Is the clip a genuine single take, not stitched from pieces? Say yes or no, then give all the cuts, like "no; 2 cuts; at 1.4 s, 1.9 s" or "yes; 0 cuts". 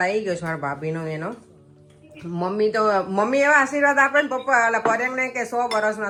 yes; 0 cuts